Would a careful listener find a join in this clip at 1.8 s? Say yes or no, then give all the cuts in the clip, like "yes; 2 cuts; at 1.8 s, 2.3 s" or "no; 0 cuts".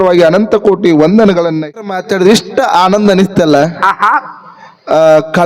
yes; 1 cut; at 1.8 s